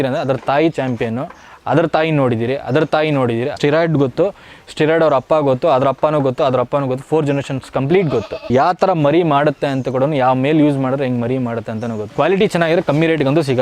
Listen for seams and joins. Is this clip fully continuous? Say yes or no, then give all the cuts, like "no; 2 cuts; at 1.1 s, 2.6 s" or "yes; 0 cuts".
no; 3 cuts; at 3.5 s, 8.5 s, 12.0 s